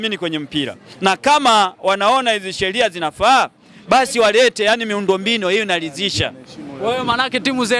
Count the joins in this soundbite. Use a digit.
0